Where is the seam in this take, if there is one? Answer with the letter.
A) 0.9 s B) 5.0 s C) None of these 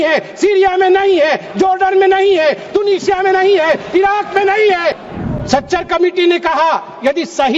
B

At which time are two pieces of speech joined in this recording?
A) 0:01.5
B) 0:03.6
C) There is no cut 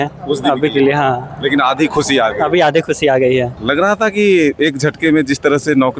B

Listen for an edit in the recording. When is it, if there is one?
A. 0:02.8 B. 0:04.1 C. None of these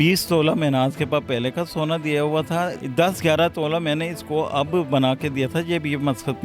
A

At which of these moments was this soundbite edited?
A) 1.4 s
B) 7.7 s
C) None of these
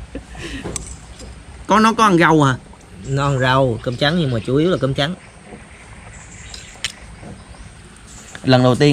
B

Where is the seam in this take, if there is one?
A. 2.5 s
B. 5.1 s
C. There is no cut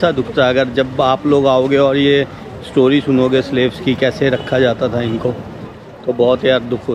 C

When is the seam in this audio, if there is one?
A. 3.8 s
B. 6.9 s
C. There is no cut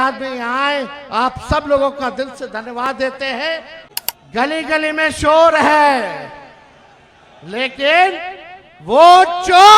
A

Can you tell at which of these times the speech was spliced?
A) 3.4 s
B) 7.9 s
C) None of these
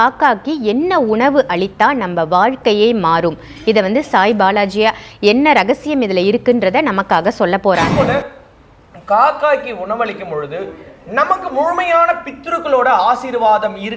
B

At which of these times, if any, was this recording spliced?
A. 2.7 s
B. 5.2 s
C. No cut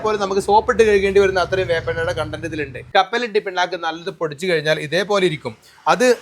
A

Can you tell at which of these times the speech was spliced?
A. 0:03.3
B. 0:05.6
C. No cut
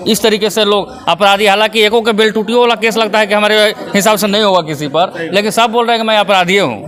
C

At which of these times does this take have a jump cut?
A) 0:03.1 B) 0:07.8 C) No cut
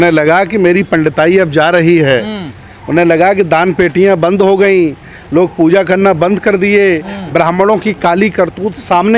C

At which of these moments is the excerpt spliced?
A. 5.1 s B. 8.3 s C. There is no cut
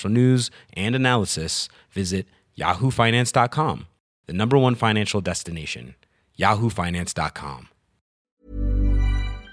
B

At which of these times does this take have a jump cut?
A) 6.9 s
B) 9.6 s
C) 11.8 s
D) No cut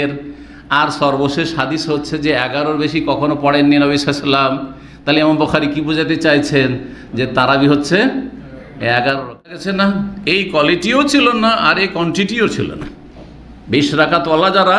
B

